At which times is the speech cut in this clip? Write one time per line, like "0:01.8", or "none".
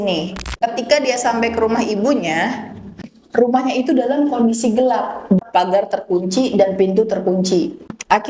none

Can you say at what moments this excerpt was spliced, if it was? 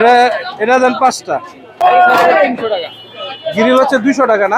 0:01.8

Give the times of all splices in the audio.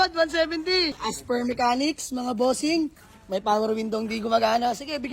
0:01.1

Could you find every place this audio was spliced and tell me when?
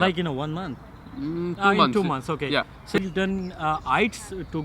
0:03.0

